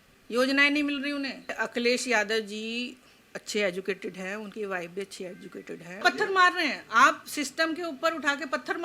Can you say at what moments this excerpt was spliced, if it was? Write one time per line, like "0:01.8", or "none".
0:01.6
0:06.0